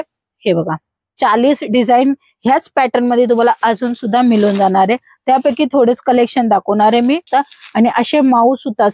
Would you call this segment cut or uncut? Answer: cut